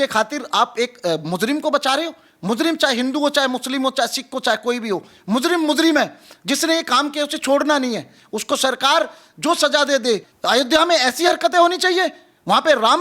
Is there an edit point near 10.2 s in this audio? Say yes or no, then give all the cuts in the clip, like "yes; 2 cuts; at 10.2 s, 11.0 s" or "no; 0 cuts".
yes; 1 cut; at 10.2 s